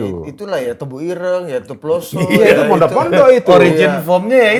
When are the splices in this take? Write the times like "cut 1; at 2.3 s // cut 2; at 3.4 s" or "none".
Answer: none